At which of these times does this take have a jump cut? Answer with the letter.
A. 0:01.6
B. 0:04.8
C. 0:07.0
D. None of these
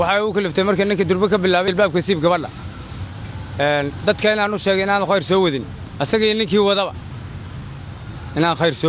A